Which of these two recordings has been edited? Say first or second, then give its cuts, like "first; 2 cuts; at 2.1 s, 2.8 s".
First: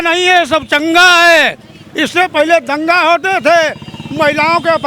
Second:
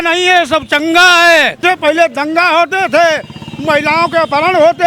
second; 1 cut; at 1.6 s